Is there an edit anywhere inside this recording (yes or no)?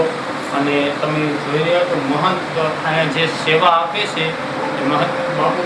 no